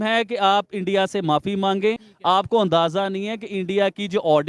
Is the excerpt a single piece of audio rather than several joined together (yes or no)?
no